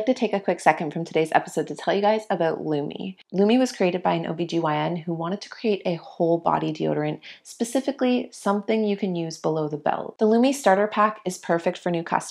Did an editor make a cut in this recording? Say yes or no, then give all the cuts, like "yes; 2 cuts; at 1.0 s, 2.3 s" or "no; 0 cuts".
yes; 2 cuts; at 3.2 s, 10.1 s